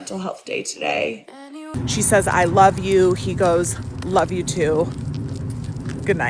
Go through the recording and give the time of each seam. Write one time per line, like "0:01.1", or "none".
0:01.8